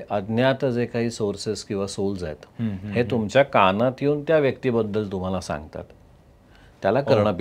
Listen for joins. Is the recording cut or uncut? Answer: uncut